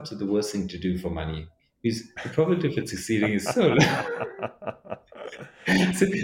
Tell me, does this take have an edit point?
no; 0 cuts

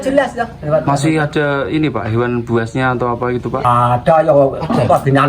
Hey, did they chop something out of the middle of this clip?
yes; 1 cut; at 3.6 s

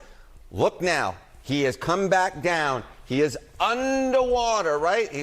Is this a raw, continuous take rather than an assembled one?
yes; 0 cuts

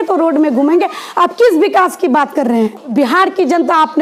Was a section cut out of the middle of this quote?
yes; 1 cut; at 2.9 s

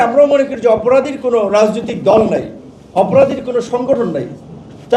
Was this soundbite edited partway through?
no; 0 cuts

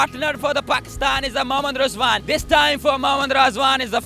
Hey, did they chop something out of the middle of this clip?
yes; 1 cut; at 2.2 s

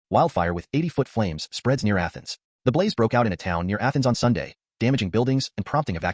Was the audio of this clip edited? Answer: no; 0 cuts

